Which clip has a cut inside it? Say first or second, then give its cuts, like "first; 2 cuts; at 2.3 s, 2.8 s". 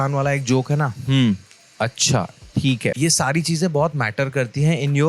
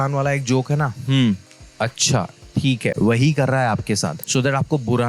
first; 1 cut; at 3.0 s